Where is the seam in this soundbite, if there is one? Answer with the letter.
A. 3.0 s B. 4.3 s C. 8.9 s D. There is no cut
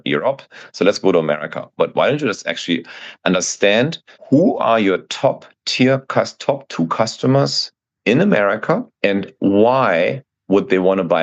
C